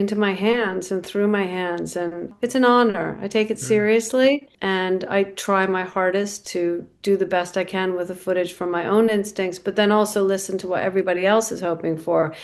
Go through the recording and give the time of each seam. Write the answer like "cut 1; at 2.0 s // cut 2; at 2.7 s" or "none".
cut 1; at 2.3 s // cut 2; at 4.5 s